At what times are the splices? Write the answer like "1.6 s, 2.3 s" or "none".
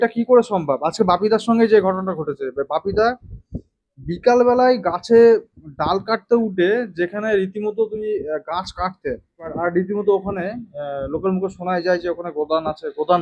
9.5 s